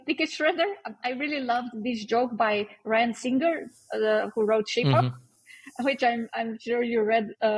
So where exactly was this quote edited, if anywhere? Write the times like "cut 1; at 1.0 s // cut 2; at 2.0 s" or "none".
none